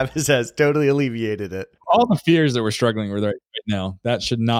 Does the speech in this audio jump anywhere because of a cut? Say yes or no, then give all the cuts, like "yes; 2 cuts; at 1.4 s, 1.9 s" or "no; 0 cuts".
yes; 1 cut; at 1.8 s